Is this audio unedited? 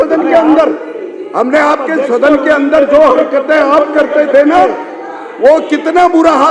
yes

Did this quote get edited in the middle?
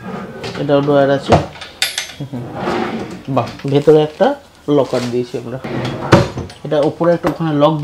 yes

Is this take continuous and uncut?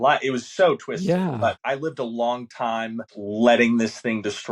no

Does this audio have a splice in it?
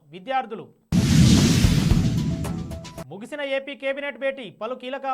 no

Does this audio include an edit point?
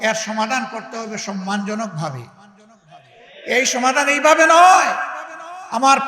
no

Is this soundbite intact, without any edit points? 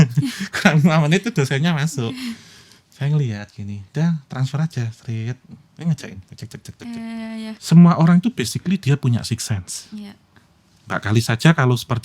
no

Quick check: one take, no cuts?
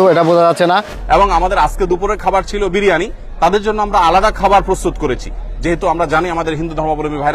no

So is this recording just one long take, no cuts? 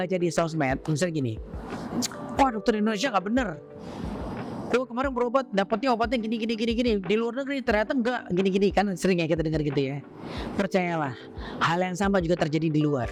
yes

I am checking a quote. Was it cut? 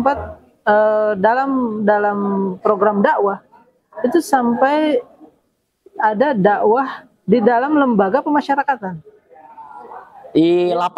no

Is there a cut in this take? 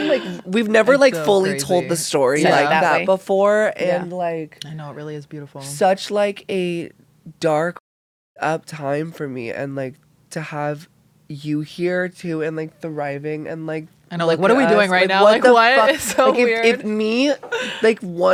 no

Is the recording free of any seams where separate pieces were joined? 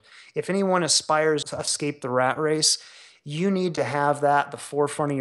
no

